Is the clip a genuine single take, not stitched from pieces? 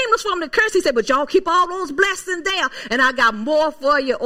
yes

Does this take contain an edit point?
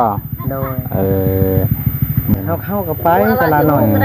yes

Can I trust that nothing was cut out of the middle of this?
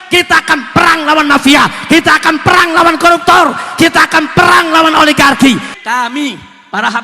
no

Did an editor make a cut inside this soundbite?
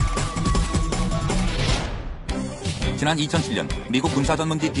no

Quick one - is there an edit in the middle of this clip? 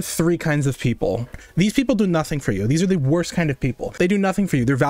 yes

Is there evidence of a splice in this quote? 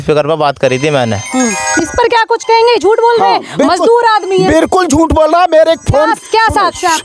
no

